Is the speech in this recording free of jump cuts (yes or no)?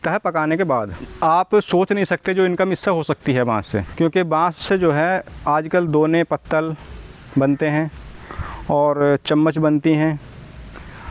no